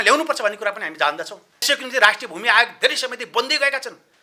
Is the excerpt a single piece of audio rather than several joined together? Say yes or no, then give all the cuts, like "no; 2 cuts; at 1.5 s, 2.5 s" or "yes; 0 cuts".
no; 1 cut; at 1.6 s